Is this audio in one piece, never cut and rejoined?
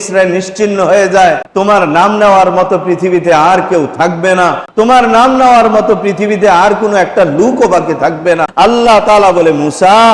no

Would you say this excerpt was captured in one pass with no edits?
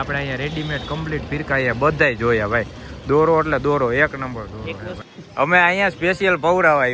no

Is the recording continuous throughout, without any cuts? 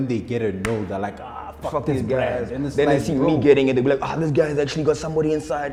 yes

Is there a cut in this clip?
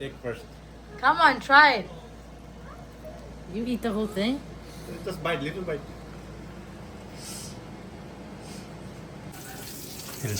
yes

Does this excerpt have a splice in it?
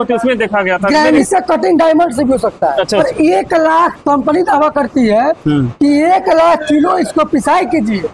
yes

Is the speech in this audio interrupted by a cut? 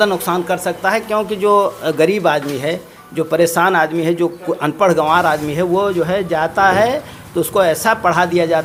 no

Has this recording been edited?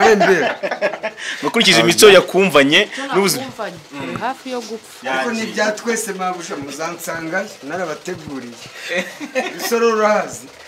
no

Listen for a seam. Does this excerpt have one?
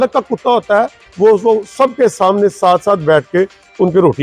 no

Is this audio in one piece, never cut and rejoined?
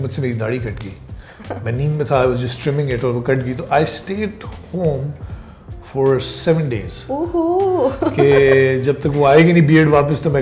yes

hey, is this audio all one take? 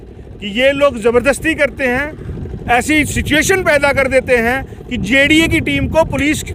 yes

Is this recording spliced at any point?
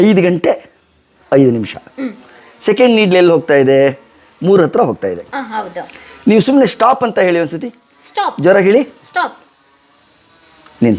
no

